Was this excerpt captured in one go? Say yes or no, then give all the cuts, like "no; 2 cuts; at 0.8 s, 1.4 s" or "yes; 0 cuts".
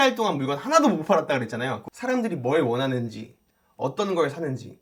yes; 0 cuts